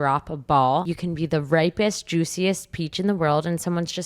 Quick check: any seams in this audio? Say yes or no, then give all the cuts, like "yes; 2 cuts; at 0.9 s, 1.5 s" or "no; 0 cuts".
yes; 1 cut; at 0.9 s